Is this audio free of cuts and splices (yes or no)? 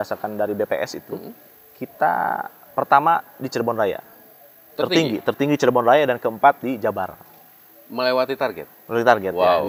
yes